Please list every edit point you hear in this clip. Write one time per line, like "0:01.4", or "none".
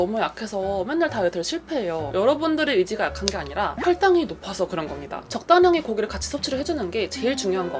0:02.1
0:03.8
0:05.4